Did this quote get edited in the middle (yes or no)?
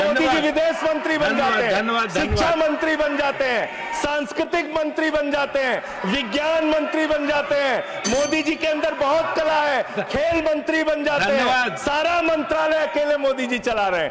no